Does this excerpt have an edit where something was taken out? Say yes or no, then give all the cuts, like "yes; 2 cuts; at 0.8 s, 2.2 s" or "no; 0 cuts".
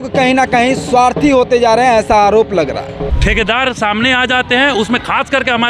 yes; 1 cut; at 3.1 s